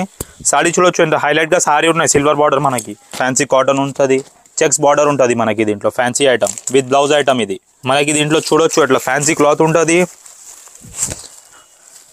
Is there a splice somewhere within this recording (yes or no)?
yes